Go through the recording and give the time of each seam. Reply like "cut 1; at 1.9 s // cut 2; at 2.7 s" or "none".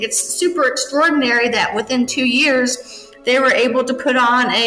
none